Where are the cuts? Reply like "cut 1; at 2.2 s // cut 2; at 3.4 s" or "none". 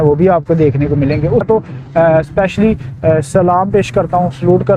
cut 1; at 1.4 s